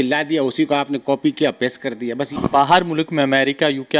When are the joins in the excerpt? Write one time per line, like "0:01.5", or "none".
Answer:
0:02.3